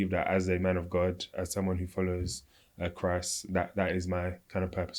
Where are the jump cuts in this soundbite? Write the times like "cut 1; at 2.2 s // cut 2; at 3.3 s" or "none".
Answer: none